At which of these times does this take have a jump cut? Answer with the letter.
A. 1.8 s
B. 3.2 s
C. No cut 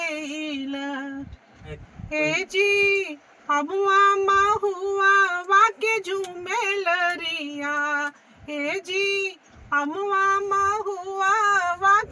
A